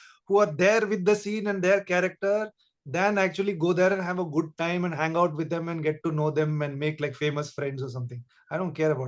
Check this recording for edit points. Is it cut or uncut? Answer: uncut